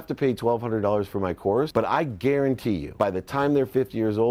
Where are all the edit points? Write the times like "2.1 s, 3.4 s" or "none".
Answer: 1.7 s, 2.9 s